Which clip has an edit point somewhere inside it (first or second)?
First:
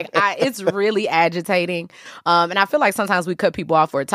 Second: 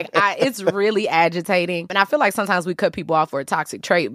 second